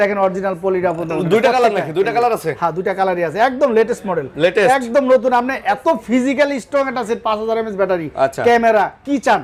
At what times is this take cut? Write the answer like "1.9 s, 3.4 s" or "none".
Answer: none